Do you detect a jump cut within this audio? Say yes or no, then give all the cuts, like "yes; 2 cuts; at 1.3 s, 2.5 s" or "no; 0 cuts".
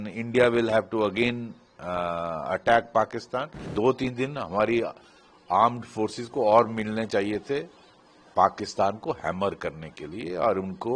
yes; 1 cut; at 3.6 s